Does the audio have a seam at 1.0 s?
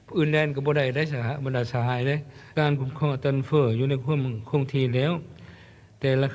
no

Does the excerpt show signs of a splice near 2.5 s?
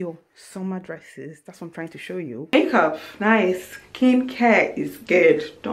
yes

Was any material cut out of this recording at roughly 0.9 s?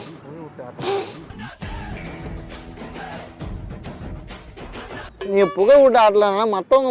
no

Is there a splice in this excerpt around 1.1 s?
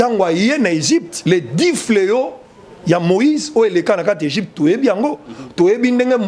yes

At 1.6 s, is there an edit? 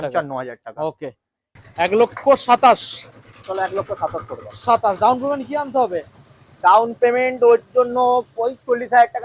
yes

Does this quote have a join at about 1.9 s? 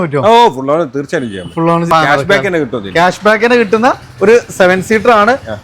yes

